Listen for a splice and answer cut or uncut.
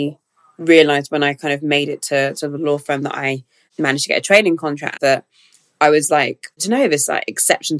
uncut